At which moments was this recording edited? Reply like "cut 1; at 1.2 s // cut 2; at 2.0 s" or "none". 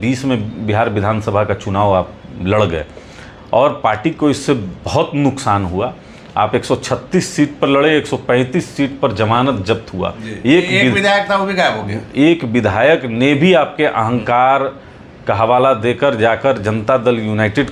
none